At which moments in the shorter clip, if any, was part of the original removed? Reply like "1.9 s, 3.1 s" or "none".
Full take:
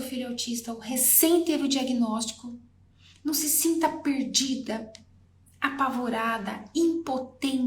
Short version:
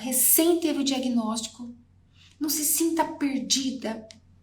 none